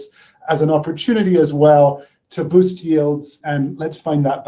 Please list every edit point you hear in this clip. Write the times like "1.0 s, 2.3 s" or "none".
3.4 s

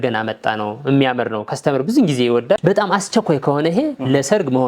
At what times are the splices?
2.6 s

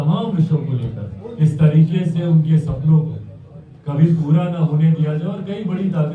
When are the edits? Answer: 1.2 s

